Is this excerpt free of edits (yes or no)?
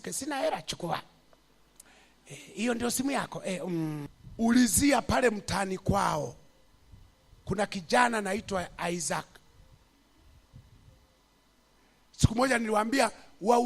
no